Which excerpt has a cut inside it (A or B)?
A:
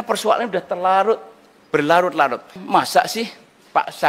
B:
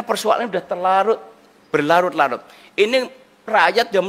A